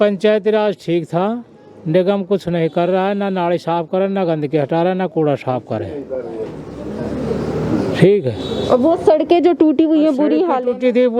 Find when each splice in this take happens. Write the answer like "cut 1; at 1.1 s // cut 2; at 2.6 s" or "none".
none